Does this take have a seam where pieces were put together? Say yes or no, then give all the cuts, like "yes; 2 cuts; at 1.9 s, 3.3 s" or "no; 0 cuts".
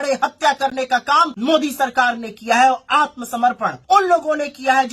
yes; 2 cuts; at 1.3 s, 3.7 s